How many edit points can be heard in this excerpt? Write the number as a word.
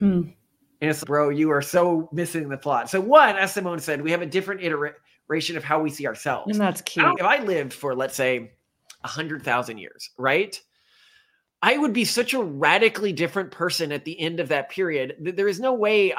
one